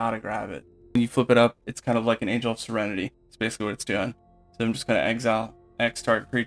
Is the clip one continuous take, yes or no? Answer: no